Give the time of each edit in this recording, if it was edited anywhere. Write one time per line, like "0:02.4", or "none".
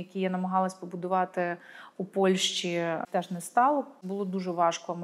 0:03.0
0:04.0